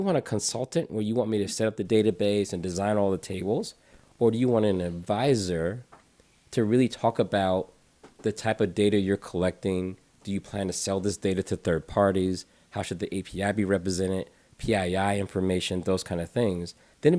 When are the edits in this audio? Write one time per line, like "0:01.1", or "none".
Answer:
none

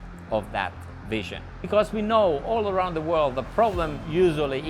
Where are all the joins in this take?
0:01.6

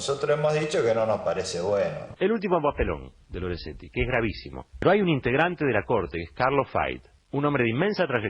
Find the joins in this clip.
0:02.1

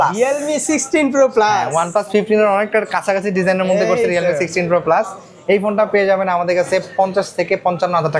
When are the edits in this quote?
none

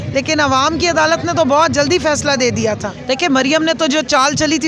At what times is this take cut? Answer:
0:02.9

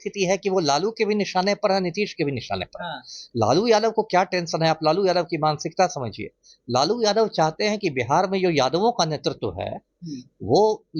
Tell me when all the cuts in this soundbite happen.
none

